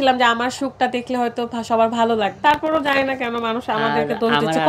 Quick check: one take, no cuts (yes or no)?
no